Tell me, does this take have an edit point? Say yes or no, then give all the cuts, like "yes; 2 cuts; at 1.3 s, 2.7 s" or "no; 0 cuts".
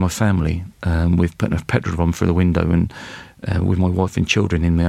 no; 0 cuts